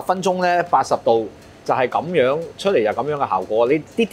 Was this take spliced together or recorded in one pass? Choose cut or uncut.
uncut